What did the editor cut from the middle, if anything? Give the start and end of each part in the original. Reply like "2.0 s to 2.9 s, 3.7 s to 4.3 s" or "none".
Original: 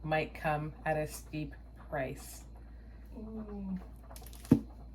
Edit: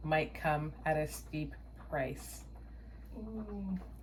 none